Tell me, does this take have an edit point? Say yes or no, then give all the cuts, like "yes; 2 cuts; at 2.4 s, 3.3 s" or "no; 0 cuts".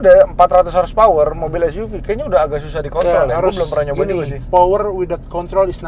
yes; 1 cut; at 4.3 s